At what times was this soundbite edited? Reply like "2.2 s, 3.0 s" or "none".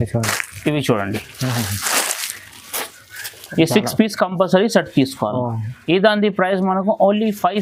none